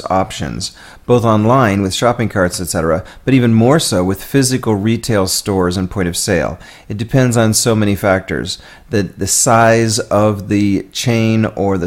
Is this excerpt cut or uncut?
cut